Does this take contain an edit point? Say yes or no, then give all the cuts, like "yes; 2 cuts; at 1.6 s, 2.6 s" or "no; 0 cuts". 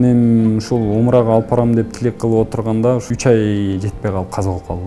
yes; 1 cut; at 3.1 s